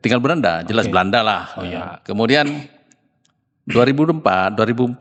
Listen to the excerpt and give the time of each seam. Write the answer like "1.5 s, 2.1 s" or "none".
none